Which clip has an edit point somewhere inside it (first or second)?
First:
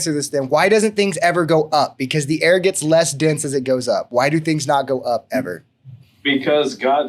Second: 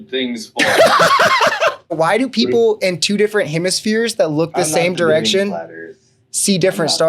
second